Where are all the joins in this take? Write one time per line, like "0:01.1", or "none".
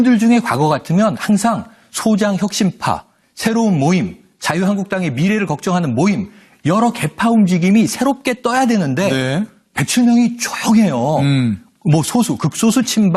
none